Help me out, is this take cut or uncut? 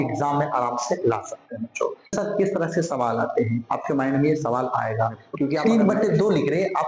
cut